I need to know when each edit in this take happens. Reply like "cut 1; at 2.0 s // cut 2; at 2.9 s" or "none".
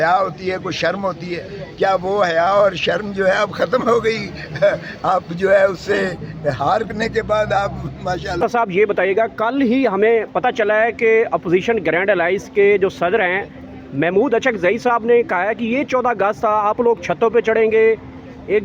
cut 1; at 8.4 s